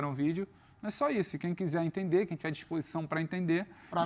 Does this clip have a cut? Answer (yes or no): no